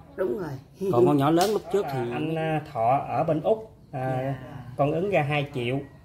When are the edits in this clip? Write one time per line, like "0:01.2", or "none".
0:02.1